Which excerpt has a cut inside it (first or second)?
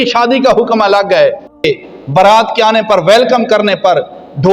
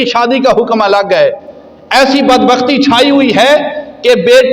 first